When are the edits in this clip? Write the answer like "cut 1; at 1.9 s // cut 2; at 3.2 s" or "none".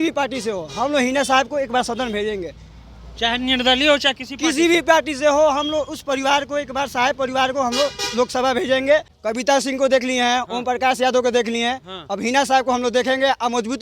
cut 1; at 9.1 s